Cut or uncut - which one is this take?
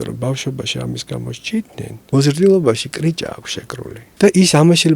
cut